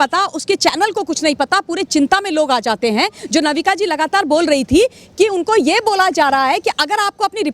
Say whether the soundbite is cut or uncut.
cut